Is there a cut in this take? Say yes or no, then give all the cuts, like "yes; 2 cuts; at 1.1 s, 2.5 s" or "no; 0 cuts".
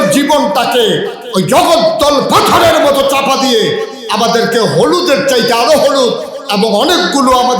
no; 0 cuts